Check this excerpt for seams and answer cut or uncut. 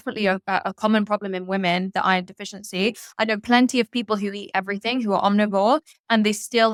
uncut